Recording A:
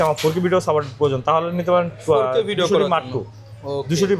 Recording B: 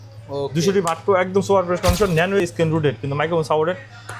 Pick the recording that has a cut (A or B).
B